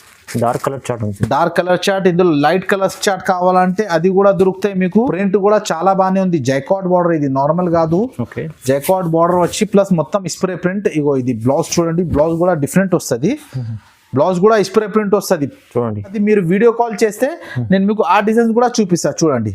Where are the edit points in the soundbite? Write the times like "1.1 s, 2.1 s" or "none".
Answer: 5.1 s, 16.2 s